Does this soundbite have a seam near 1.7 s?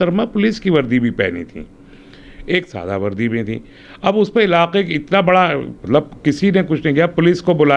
no; 0 cuts

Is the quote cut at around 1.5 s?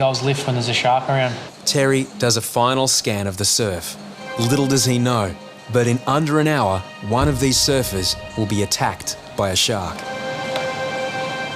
yes; 5 cuts; at 1.5 s, 4.2 s, 6.9 s, 8.2 s, 10.1 s

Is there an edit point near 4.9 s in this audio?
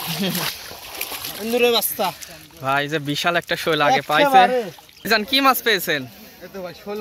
yes; 1 cut; at 4.9 s

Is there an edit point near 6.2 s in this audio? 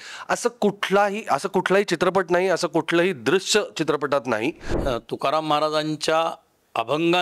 no; 1 cut; at 4.7 s

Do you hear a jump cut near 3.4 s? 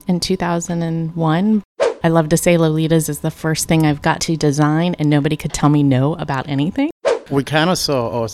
no; 2 cuts; at 1.7 s, 6.9 s

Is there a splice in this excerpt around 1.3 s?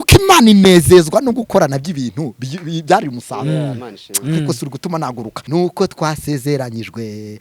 no; 1 cut; at 5.3 s

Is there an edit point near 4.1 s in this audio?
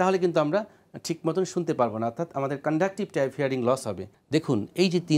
yes; 1 cut; at 4.1 s

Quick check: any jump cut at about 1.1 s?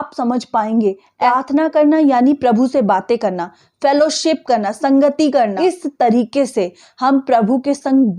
yes; 2 cuts; at 1.1 s, 5.5 s

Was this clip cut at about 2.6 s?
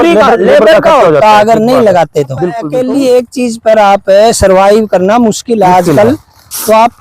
yes; 1 cut; at 2.6 s

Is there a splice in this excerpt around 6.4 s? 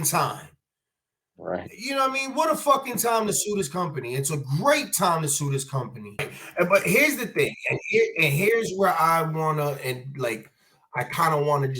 yes; 1 cut; at 6.4 s

